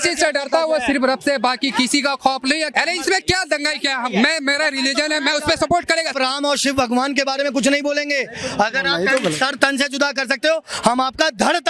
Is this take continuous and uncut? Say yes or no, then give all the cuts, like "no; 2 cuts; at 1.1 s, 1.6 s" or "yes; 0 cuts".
no; 2 cuts; at 2.7 s, 6.1 s